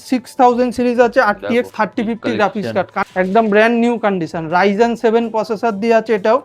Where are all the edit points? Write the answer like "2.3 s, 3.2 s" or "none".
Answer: 3.0 s